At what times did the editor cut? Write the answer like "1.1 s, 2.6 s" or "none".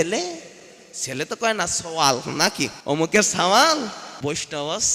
2.8 s, 4.1 s